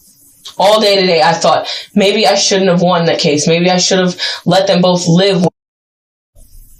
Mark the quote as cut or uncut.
uncut